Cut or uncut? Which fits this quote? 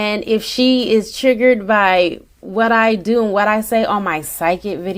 uncut